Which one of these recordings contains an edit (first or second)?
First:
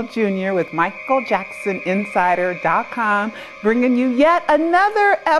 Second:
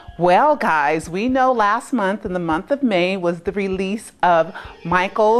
first